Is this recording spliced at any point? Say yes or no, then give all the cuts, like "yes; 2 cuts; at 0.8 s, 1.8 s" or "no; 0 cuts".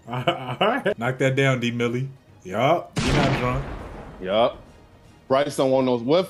yes; 1 cut; at 1.0 s